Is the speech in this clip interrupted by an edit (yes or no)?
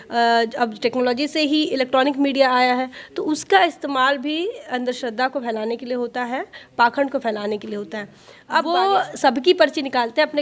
yes